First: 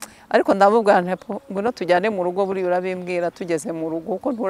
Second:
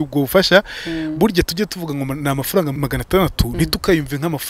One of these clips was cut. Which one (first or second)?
second